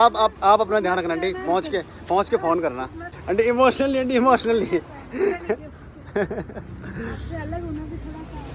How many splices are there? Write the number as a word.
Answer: one